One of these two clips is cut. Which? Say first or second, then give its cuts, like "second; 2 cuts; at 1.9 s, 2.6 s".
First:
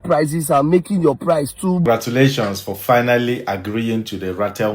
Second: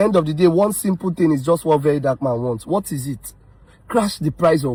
first; 1 cut; at 1.8 s